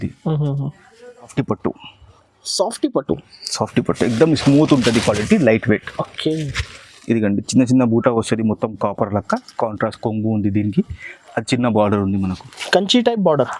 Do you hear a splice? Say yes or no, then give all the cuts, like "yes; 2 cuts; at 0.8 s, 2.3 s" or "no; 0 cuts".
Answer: yes; 1 cut; at 1.3 s